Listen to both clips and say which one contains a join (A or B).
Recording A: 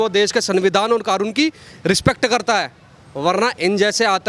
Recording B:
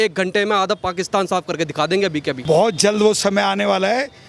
B